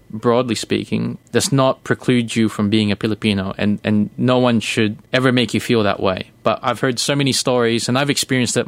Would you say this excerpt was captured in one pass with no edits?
no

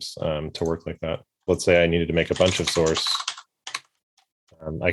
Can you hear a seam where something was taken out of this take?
yes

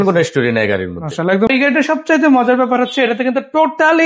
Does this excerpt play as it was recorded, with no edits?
no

